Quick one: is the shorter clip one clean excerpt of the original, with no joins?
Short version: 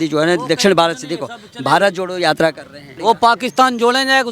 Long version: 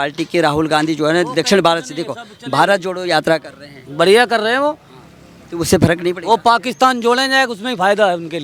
no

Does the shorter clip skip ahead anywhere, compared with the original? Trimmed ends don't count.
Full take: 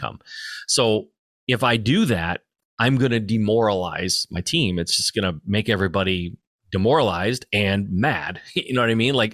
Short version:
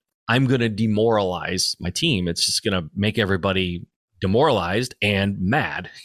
no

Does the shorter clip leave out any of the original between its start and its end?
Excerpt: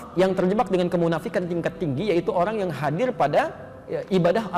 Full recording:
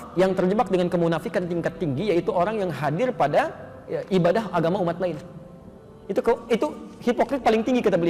no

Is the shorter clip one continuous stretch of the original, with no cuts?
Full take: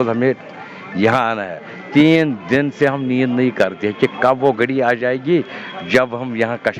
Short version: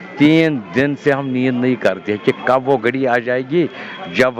yes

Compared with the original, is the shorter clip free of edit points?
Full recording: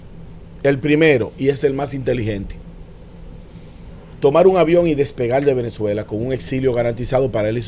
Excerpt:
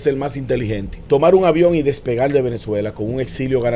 no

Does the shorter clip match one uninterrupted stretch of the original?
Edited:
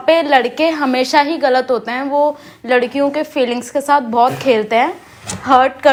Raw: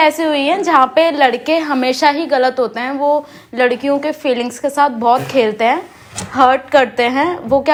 yes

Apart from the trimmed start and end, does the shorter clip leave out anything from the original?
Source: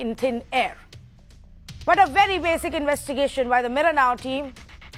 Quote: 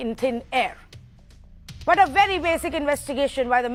no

